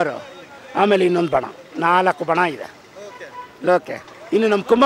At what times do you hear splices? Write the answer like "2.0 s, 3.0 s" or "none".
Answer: none